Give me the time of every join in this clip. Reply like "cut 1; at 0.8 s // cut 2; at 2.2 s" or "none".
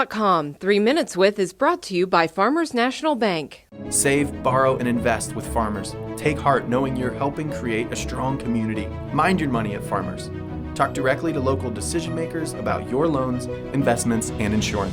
none